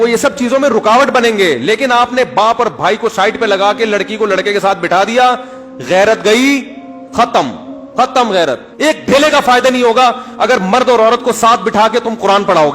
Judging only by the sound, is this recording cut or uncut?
cut